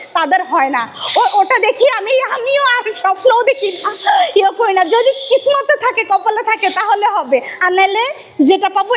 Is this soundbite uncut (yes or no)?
yes